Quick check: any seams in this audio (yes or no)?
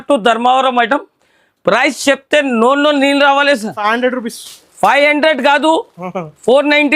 yes